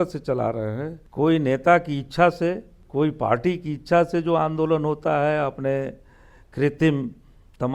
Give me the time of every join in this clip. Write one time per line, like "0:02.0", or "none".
0:01.0
0:02.8